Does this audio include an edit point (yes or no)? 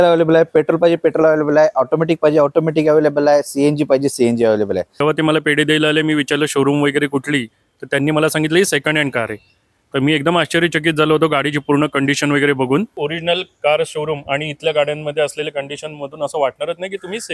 yes